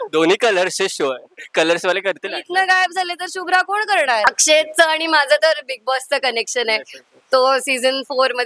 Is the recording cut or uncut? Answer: cut